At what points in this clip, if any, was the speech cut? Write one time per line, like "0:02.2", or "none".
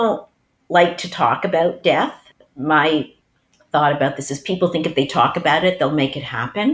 0:02.2
0:03.2

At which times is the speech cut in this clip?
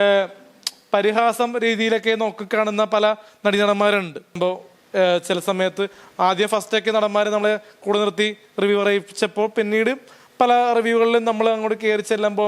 0:04.4

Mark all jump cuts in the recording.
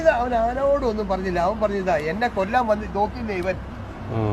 none

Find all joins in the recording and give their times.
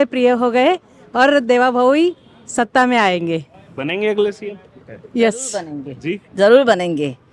none

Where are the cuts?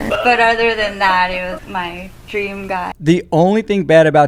0:01.6
0:03.0

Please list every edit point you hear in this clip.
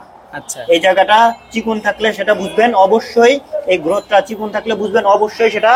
none

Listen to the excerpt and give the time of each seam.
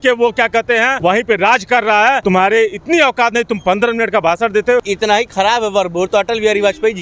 0:00.9
0:02.2
0:04.9

